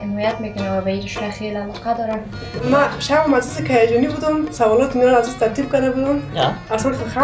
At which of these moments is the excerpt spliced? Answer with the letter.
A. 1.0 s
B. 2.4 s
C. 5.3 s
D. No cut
B